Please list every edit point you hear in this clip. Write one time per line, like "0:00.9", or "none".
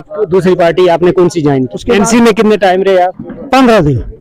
0:01.8
0:03.3

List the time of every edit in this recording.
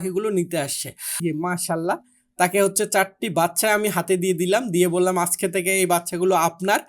0:01.2

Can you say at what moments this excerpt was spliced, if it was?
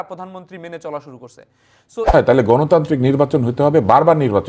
0:02.1

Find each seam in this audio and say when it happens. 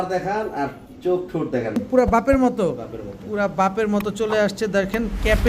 0:01.8

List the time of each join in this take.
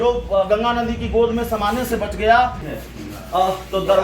0:02.7

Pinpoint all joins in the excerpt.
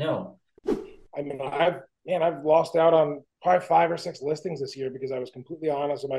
0:00.9
0:01.9
0:03.3

